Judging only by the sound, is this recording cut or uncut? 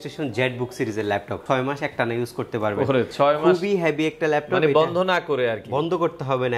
cut